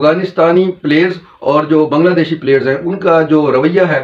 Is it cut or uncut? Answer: uncut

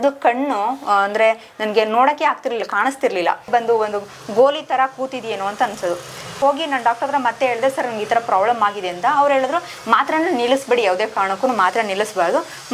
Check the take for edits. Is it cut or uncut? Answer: uncut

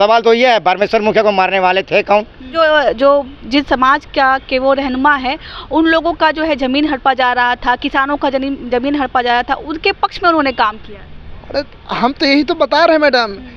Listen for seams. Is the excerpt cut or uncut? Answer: cut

